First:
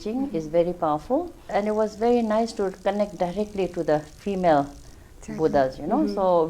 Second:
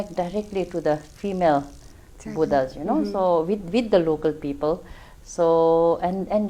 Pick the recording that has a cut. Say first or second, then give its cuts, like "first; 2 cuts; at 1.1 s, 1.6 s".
first; 1 cut; at 1.5 s